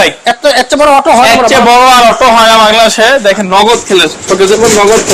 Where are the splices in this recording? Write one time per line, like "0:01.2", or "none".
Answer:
none